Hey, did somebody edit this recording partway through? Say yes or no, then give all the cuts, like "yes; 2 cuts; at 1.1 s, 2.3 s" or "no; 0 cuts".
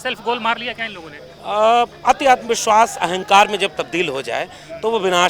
no; 0 cuts